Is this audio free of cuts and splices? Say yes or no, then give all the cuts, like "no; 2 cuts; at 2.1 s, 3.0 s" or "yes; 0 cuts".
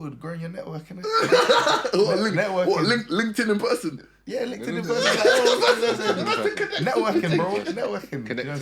yes; 0 cuts